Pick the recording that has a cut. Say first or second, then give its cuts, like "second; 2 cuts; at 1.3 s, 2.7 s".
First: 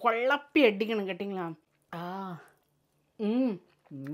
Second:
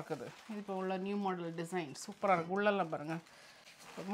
first; 1 cut; at 1.7 s